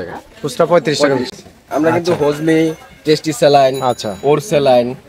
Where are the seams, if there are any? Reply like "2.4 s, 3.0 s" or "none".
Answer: 1.5 s